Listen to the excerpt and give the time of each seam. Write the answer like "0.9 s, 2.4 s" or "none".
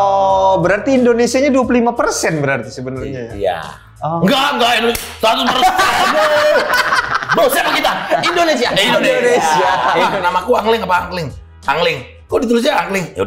10.1 s